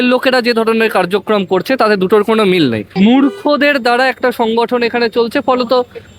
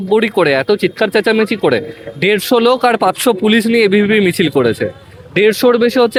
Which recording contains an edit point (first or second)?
first